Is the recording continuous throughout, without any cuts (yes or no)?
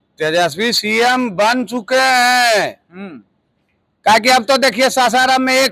yes